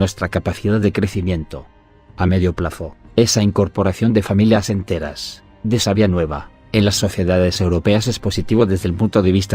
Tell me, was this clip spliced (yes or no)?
yes